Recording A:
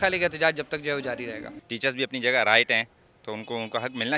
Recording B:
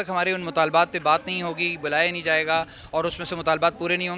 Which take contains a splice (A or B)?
A